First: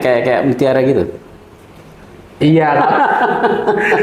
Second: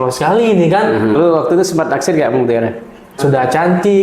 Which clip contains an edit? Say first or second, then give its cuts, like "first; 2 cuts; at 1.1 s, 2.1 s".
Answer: second; 2 cuts; at 1.1 s, 3.2 s